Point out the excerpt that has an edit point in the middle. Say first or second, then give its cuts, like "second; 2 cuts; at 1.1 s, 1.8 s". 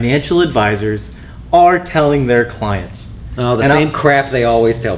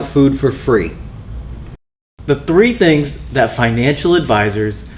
second; 1 cut; at 1.8 s